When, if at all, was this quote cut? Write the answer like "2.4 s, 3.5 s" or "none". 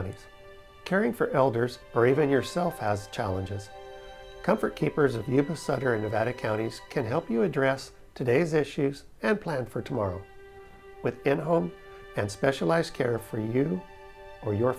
5.2 s